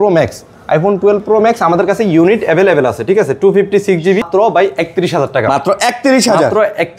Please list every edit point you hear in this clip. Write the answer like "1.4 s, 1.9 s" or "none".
4.3 s